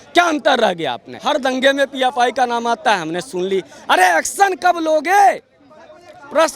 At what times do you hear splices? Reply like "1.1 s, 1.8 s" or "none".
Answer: 1.1 s